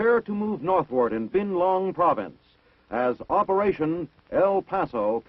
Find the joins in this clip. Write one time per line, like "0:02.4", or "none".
none